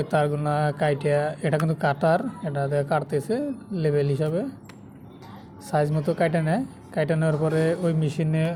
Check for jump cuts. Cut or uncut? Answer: uncut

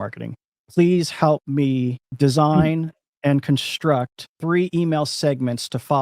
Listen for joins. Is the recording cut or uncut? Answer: cut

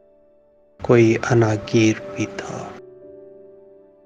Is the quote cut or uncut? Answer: cut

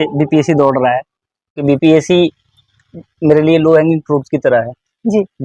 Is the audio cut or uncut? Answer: cut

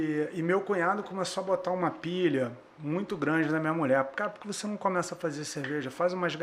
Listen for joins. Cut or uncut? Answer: uncut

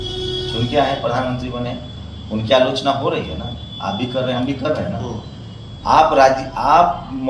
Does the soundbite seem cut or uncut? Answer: uncut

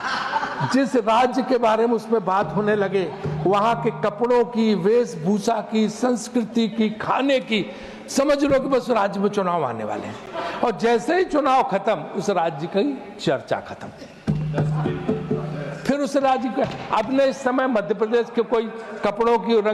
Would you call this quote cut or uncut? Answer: uncut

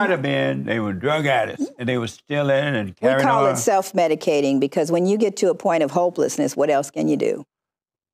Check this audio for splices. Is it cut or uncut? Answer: uncut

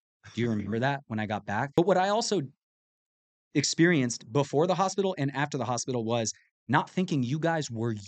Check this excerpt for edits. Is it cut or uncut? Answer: cut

